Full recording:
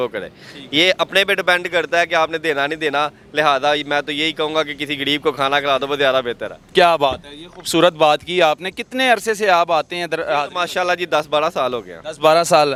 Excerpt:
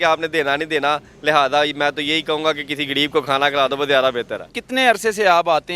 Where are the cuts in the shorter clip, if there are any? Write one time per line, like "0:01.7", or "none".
0:04.5